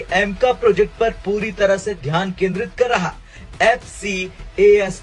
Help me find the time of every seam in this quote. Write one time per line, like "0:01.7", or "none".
0:03.4